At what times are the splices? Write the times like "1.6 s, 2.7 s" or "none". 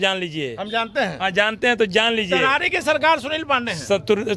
none